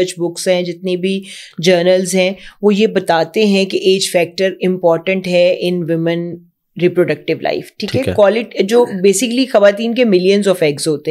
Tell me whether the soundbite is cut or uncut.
uncut